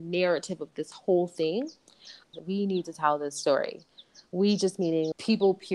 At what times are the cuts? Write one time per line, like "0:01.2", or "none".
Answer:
0:02.3